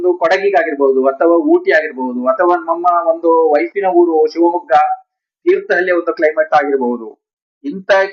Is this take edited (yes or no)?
no